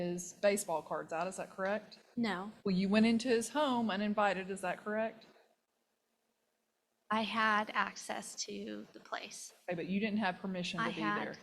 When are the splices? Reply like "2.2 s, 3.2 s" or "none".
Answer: 2.5 s